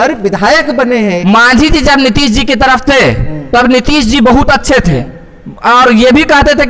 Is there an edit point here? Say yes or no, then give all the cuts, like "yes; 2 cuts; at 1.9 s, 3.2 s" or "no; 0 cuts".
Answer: yes; 1 cut; at 1.1 s